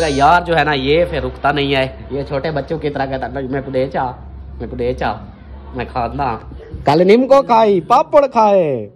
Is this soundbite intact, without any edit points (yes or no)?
yes